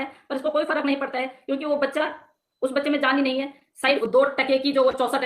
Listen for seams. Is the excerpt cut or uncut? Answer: cut